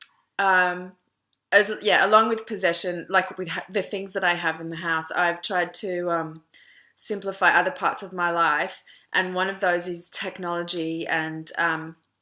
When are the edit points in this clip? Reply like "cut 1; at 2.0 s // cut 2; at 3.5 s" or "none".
cut 1; at 9.5 s